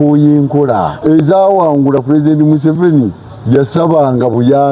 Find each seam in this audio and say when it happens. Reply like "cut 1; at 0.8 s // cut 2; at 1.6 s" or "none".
cut 1; at 1.0 s